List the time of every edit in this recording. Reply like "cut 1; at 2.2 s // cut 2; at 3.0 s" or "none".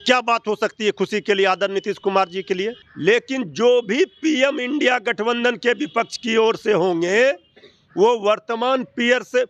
cut 1; at 2.8 s